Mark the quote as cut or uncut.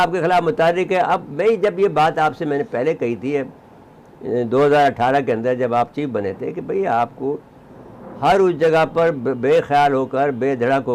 uncut